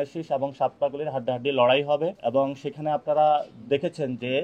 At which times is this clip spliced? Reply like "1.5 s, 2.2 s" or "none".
none